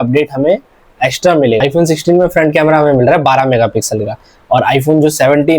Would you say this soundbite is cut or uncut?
cut